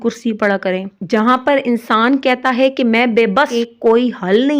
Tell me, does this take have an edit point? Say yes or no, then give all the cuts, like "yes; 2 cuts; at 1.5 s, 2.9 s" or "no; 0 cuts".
yes; 2 cuts; at 0.9 s, 3.5 s